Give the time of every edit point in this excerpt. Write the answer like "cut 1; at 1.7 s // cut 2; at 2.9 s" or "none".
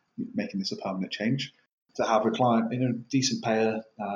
cut 1; at 1.8 s